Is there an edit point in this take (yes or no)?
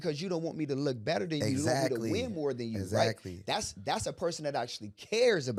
no